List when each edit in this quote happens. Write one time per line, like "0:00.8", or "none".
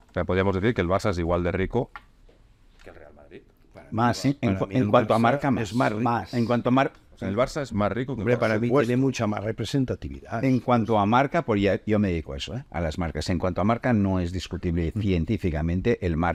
none